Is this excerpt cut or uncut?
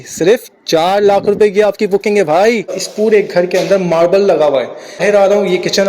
cut